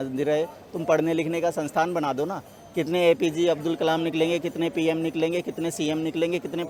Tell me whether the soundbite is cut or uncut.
uncut